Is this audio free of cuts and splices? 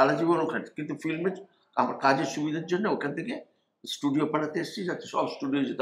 yes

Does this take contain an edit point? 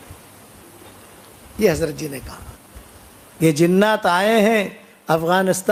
no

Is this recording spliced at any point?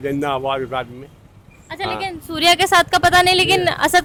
no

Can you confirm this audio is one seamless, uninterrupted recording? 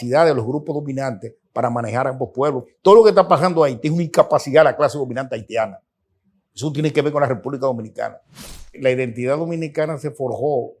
no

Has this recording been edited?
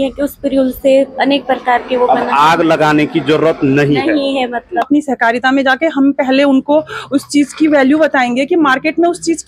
yes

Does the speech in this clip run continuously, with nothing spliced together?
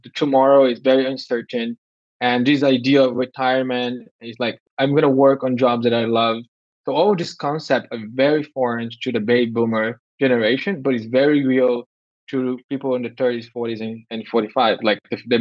no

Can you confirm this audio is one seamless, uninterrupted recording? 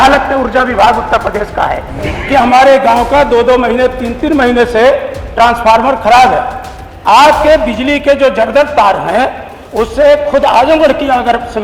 no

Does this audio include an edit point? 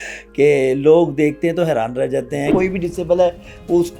yes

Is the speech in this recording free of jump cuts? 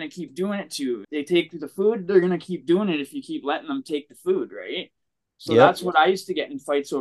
no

